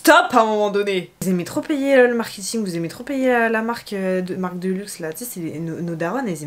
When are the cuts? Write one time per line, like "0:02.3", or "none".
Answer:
0:01.1